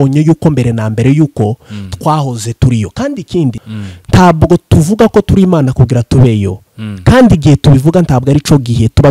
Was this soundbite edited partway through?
yes; 1 cut; at 3.6 s

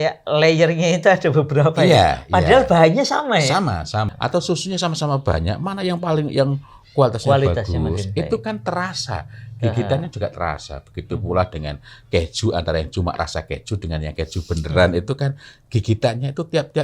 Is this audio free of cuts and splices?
no; 1 cut; at 4.1 s

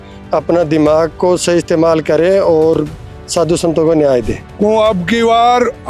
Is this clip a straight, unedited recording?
no; 1 cut; at 4.4 s

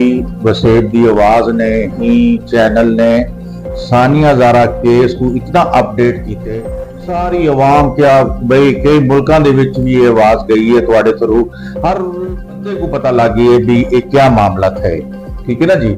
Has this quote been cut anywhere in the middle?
no; 0 cuts

